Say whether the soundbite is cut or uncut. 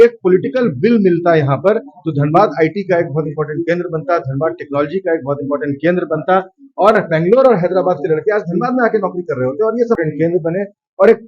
cut